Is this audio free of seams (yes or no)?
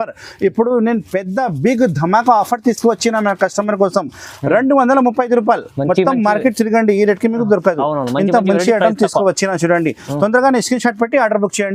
yes